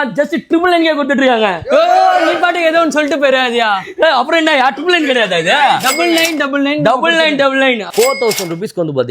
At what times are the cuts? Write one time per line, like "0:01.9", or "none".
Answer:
0:07.8